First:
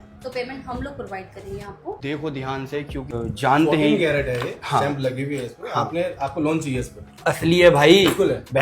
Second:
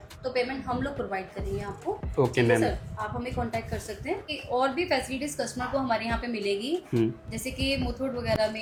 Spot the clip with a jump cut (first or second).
first